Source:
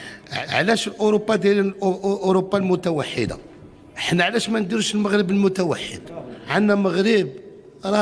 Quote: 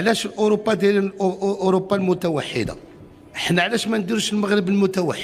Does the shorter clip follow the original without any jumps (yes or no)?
yes